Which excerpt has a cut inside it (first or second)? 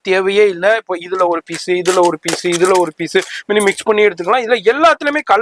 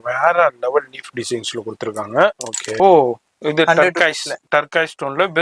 second